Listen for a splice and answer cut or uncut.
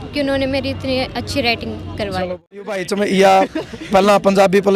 cut